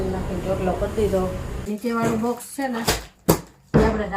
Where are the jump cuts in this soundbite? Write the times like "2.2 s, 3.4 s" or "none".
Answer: 1.5 s